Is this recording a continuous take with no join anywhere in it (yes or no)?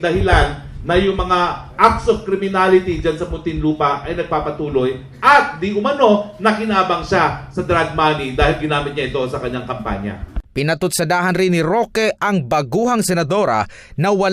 no